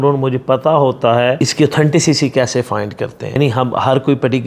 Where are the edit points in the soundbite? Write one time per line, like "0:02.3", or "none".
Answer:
0:01.4
0:03.4